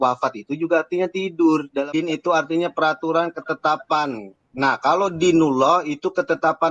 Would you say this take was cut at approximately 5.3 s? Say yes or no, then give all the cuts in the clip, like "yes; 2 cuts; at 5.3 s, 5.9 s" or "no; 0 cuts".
no; 1 cut; at 1.8 s